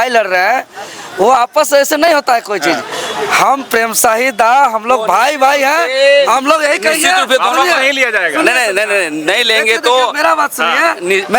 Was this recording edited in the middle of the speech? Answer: no; 0 cuts

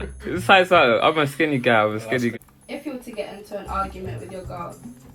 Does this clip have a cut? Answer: yes; 1 cut; at 2.3 s

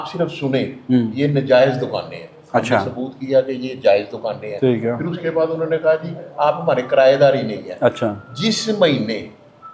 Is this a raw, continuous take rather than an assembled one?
yes; 0 cuts

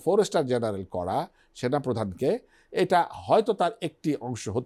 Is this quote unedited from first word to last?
yes; 0 cuts

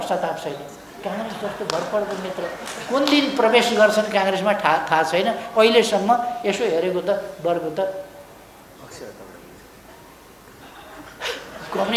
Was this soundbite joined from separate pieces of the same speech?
no; 0 cuts

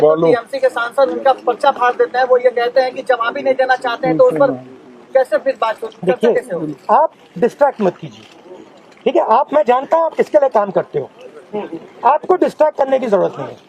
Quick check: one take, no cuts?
yes; 0 cuts

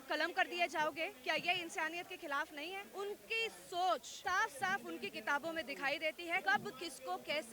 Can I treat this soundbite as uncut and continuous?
no; 3 cuts; at 2.9 s, 4.1 s, 6.4 s

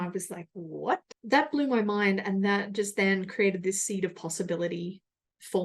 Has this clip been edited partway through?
yes; 1 cut; at 1.1 s

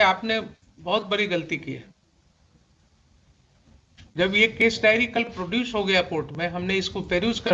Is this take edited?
no; 0 cuts

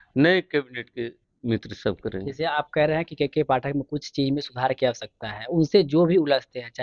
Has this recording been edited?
no; 0 cuts

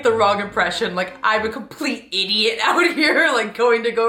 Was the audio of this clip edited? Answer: no; 0 cuts

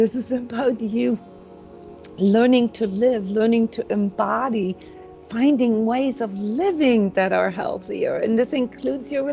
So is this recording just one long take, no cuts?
yes; 0 cuts

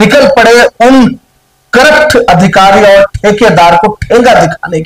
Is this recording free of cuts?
yes; 0 cuts

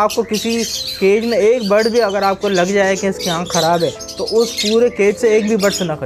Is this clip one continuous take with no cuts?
yes; 0 cuts

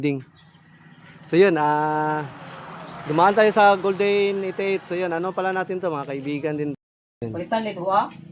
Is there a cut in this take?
yes; 1 cut; at 6.8 s

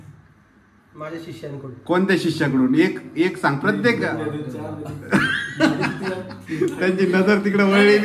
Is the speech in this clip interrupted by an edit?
no; 0 cuts

